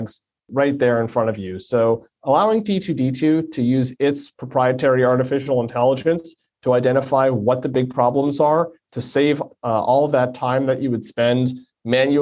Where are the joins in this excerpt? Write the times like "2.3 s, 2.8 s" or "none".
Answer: none